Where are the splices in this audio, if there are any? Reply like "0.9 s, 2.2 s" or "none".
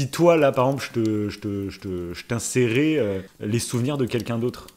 3.3 s